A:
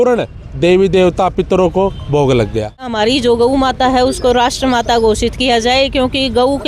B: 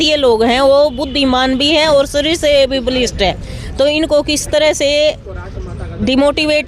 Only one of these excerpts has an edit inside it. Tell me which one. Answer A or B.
A